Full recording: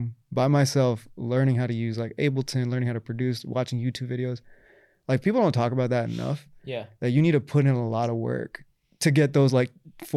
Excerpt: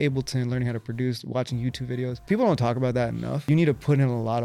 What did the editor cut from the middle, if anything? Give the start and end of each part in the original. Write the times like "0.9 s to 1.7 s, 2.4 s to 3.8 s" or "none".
4.5 s to 5.2 s, 6.4 s to 7.1 s